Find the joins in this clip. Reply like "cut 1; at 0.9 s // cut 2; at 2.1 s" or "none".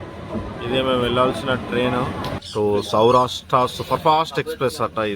cut 1; at 2.3 s